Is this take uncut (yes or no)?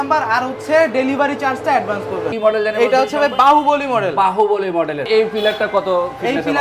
no